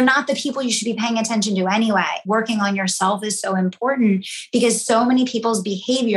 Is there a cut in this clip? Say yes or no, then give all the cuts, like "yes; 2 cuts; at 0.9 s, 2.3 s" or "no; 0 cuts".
yes; 1 cut; at 2.2 s